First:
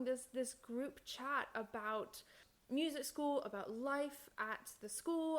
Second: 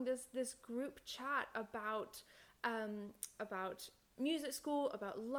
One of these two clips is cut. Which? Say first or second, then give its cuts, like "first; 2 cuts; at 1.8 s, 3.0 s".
first; 1 cut; at 2.4 s